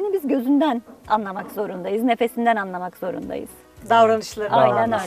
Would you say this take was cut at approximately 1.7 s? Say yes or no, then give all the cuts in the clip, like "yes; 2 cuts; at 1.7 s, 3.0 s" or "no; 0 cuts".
no; 0 cuts